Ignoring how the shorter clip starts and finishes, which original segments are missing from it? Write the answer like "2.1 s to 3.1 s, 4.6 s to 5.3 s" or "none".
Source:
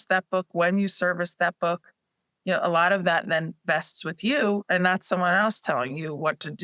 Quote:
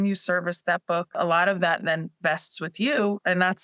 1.9 s to 2.6 s